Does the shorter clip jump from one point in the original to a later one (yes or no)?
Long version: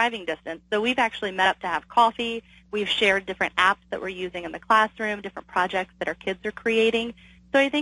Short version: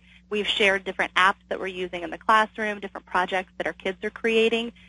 no